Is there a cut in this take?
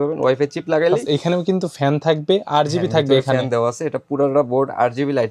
no; 0 cuts

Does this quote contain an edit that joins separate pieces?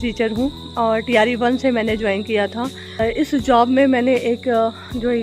yes; 1 cut; at 3.0 s

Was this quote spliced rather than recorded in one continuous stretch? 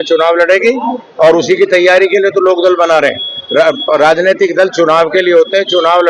no; 0 cuts

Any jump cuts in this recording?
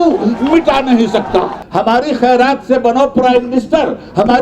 yes; 1 cut; at 1.6 s

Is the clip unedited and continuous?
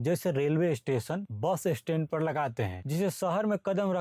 yes; 0 cuts

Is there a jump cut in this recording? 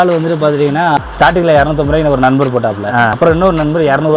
yes; 2 cuts; at 0.9 s, 3.1 s

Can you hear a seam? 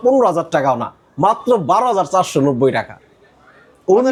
no; 0 cuts

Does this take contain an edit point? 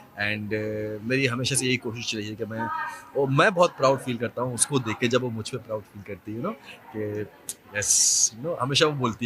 no; 0 cuts

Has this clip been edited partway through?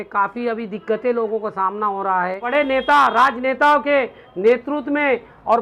yes; 1 cut; at 2.5 s

